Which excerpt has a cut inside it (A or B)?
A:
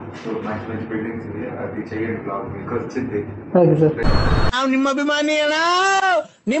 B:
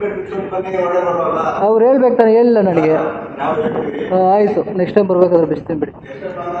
A